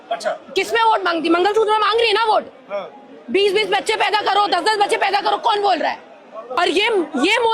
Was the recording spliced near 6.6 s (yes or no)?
yes